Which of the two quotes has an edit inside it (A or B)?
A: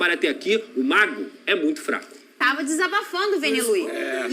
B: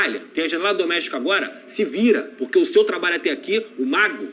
A